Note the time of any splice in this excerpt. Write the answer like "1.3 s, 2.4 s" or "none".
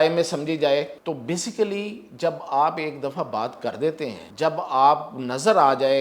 0.9 s, 4.2 s